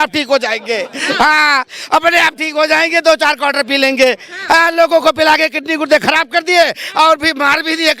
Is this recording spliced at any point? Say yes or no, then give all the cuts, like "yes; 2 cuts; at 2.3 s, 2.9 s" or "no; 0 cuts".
no; 0 cuts